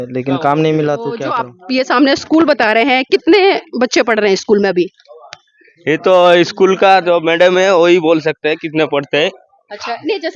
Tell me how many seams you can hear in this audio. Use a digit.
1